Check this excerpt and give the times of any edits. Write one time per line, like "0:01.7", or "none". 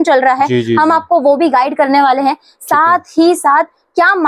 none